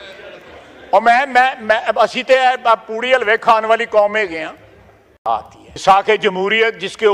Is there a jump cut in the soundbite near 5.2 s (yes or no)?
yes